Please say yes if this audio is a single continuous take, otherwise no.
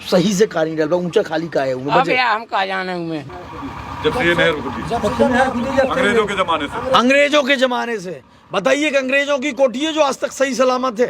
no